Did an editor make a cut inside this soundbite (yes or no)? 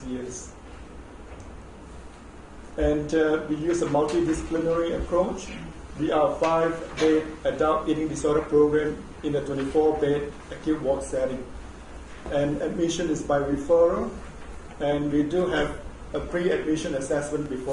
yes